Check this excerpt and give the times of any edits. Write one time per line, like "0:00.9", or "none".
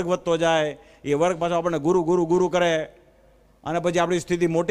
none